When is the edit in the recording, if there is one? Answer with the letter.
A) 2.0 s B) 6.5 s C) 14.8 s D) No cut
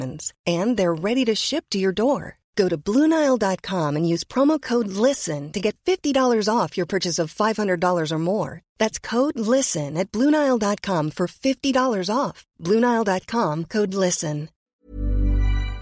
C